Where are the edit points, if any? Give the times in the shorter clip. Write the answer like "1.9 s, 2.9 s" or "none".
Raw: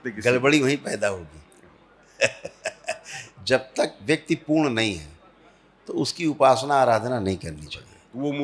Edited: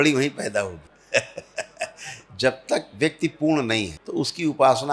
0.9 s, 4.0 s